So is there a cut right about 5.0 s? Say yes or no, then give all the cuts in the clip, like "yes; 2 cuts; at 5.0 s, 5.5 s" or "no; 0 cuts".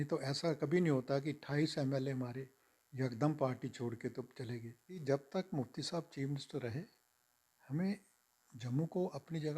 yes; 1 cut; at 5.0 s